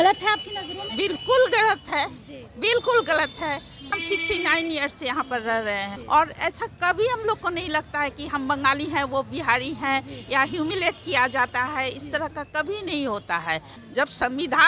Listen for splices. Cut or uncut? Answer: cut